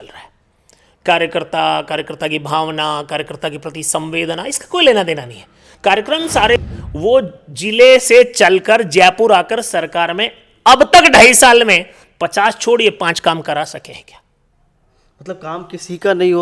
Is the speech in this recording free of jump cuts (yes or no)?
no